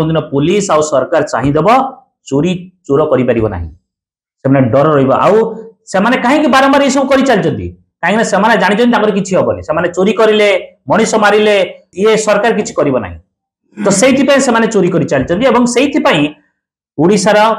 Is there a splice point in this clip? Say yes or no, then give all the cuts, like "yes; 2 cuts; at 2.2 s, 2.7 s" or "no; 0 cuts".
no; 0 cuts